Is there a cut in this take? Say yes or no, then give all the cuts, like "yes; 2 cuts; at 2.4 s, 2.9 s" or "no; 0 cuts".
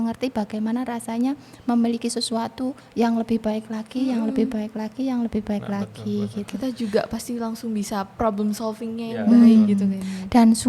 no; 0 cuts